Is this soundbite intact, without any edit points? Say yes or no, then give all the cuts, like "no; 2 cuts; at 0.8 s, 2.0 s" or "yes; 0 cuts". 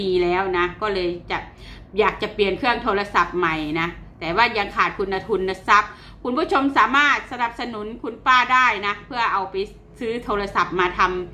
yes; 0 cuts